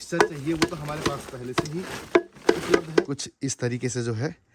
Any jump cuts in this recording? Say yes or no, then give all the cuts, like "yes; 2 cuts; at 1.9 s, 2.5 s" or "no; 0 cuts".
yes; 1 cut; at 3.1 s